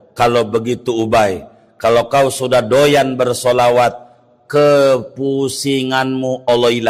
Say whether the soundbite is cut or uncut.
uncut